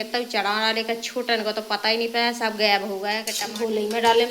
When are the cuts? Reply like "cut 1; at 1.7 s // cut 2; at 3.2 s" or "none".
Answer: cut 1; at 3.4 s